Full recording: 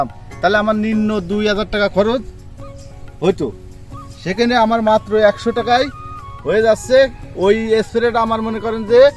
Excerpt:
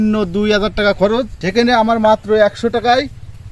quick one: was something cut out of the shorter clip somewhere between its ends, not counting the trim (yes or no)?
yes